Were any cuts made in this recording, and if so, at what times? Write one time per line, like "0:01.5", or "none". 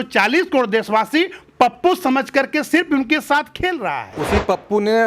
0:04.1

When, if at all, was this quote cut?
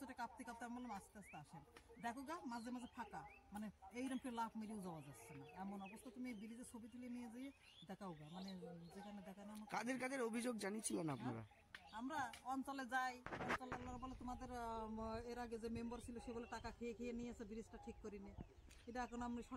none

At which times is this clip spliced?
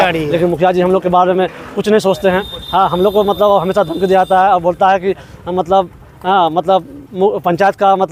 none

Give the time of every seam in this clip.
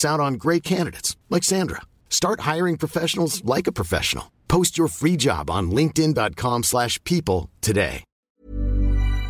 0:08.4

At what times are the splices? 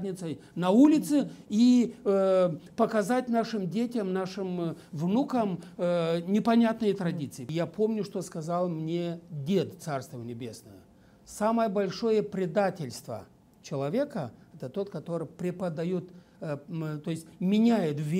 0:07.4

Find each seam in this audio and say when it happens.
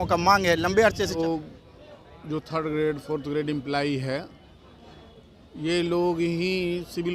0:01.2

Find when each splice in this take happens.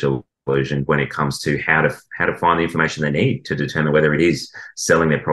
none

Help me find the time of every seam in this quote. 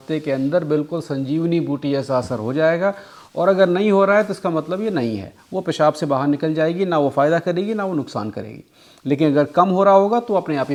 none

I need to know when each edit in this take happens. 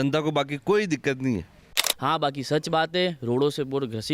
0:01.9

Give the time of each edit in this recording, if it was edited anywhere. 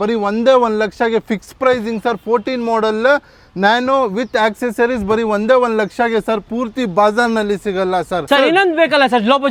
none

